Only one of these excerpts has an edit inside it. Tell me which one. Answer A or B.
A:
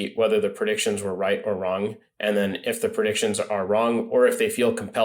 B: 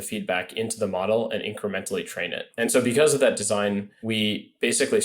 B